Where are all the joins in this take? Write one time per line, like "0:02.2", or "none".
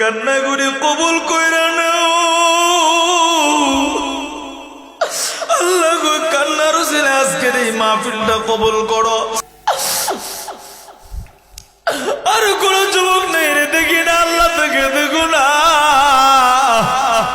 0:09.4